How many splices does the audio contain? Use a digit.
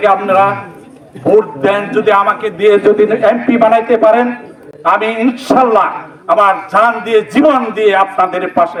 0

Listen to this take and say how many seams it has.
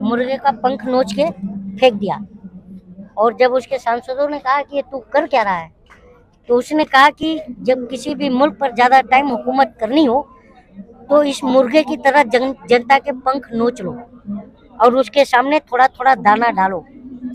0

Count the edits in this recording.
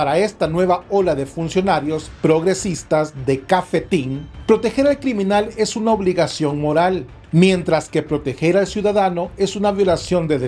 0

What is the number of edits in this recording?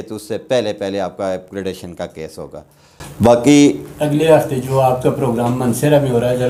0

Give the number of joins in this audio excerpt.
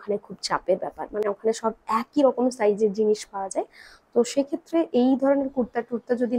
0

